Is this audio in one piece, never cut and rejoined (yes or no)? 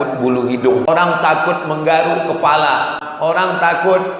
no